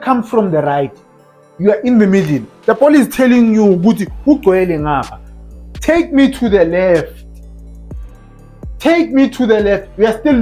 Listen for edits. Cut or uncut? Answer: uncut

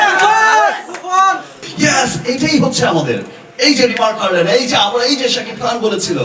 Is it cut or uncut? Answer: cut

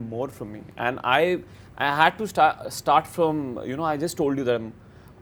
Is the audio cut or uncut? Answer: uncut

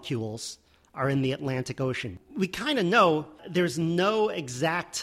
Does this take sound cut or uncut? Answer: cut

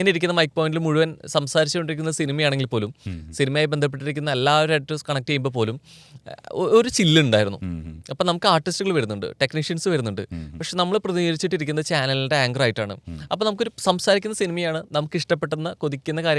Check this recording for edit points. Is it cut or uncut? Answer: uncut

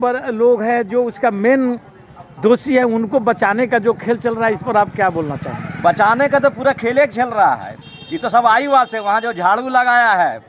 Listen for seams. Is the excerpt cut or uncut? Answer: uncut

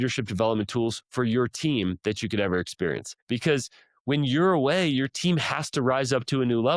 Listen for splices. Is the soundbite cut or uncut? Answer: cut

